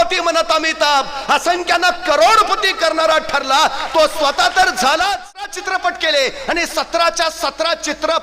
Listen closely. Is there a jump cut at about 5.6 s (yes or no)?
yes